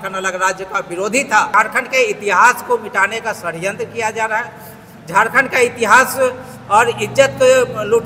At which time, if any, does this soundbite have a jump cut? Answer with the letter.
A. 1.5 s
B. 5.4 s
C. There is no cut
A